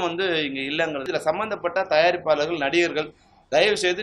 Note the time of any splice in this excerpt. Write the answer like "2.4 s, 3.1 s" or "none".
1.0 s